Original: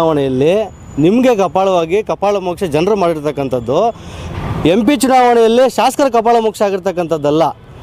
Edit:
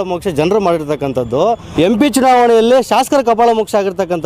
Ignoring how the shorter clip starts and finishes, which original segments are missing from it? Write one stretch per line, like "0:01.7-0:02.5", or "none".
0:04.0-0:04.5